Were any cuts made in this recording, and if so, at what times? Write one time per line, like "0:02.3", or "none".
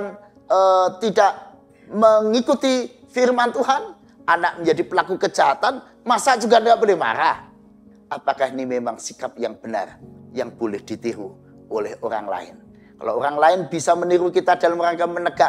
0:07.9